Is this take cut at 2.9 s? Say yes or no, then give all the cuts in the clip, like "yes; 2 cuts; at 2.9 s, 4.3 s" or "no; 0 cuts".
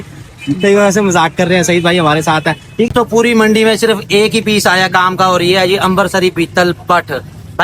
yes; 1 cut; at 2.9 s